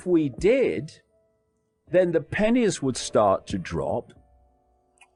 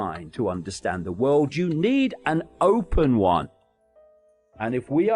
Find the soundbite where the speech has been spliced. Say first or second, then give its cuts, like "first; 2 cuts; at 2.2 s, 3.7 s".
second; 1 cut; at 3.9 s